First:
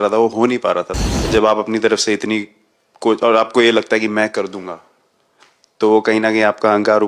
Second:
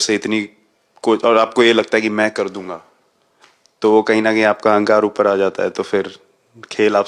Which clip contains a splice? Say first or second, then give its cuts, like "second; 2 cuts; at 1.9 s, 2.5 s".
first; 1 cut; at 1.0 s